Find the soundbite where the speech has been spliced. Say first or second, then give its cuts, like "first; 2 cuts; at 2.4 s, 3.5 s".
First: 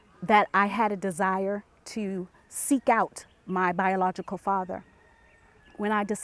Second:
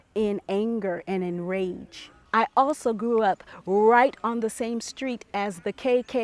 second; 1 cut; at 2.1 s